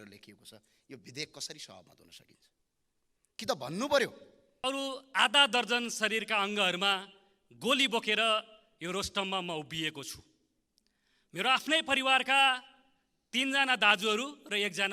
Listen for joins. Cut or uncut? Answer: cut